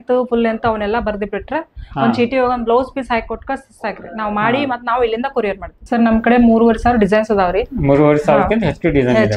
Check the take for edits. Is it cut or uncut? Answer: cut